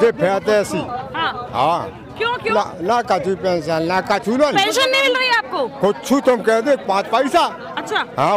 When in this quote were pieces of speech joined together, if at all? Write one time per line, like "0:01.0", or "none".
none

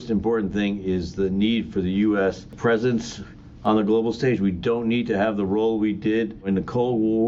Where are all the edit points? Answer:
0:02.5
0:06.5

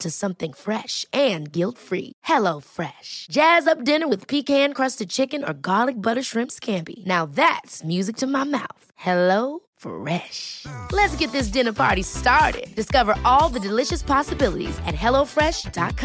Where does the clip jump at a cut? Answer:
none

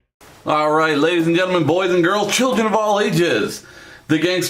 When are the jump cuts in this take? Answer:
0:00.9

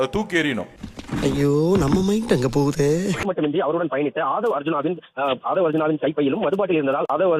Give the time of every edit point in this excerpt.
0:03.1

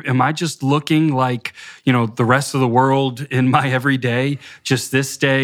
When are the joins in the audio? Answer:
none

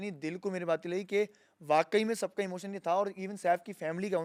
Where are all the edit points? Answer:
none

